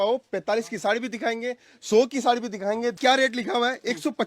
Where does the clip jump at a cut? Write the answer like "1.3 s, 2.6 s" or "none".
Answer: 3.0 s